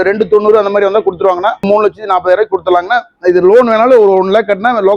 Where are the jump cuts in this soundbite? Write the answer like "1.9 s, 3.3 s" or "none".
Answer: 1.6 s